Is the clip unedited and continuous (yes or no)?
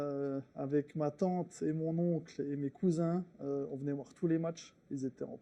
yes